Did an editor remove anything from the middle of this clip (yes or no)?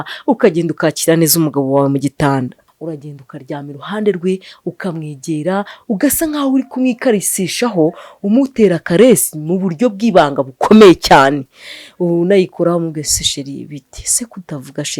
yes